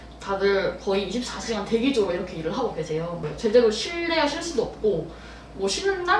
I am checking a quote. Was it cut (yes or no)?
yes